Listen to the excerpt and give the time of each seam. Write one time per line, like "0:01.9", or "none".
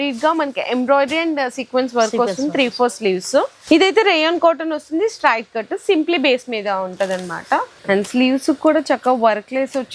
0:03.6
0:07.7